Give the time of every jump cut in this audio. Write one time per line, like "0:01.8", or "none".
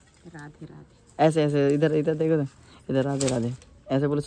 none